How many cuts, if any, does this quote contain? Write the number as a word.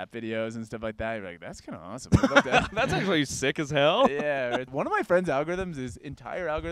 one